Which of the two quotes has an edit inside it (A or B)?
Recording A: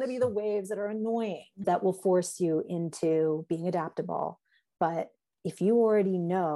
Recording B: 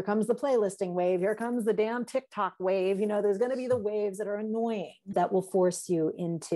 A